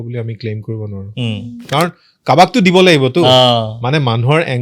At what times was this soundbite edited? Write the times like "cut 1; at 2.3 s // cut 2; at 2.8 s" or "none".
cut 1; at 1.6 s